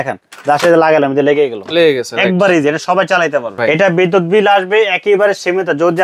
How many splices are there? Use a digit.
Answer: 1